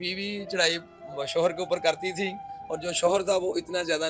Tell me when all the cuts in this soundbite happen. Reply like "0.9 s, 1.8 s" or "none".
none

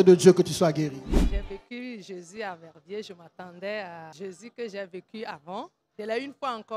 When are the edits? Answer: 1.1 s, 4.1 s, 5.8 s

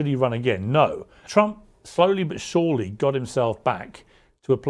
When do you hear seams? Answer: 1.2 s

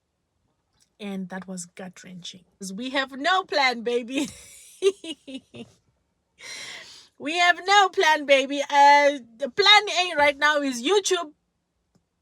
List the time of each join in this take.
2.6 s

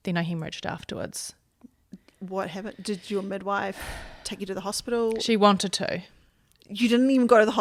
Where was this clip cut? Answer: none

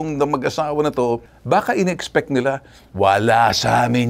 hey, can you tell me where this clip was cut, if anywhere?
1.3 s

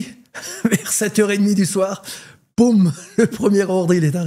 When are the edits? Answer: none

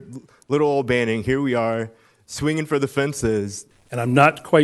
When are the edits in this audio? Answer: 3.6 s

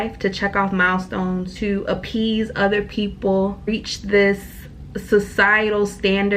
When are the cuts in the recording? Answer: 1.5 s, 3.7 s

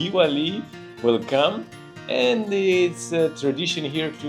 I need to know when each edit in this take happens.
none

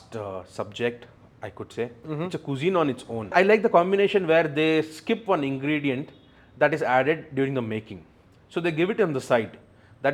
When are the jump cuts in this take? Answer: 3.3 s

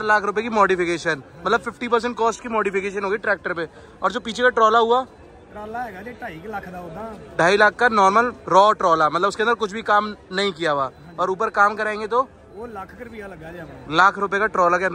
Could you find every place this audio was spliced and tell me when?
none

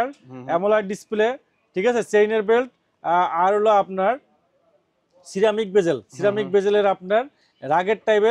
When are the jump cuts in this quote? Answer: none

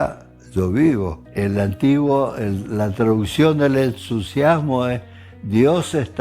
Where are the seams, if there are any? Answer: 1.2 s

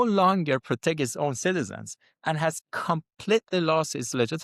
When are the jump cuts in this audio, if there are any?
none

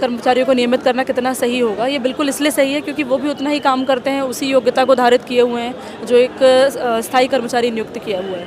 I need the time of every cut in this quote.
none

